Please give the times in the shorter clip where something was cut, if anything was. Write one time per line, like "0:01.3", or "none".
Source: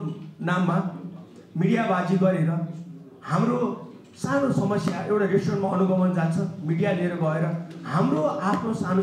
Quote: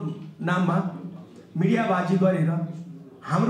none